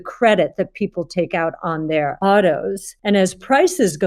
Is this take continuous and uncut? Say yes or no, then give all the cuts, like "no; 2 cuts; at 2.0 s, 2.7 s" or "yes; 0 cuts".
no; 2 cuts; at 2.2 s, 2.9 s